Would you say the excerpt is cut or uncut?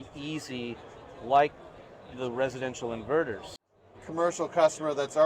cut